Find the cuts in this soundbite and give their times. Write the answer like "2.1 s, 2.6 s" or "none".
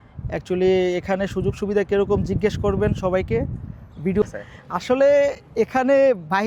4.2 s